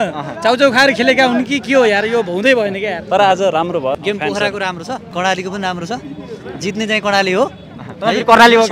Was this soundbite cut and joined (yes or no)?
yes